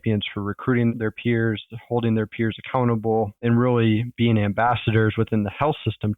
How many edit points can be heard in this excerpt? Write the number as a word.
zero